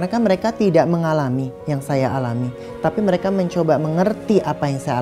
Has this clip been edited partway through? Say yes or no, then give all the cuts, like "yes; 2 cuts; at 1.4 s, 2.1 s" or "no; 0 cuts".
yes; 1 cut; at 1.6 s